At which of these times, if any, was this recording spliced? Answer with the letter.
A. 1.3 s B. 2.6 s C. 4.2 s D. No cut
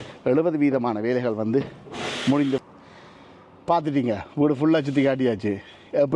B